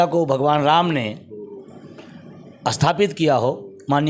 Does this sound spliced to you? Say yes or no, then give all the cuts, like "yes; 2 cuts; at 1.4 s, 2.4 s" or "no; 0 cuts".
no; 0 cuts